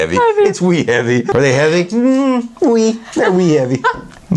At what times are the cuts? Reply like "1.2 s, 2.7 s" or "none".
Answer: 1.3 s